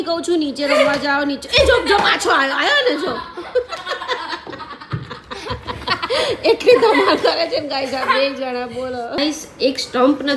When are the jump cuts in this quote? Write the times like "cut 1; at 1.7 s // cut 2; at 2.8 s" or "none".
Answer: cut 1; at 9.1 s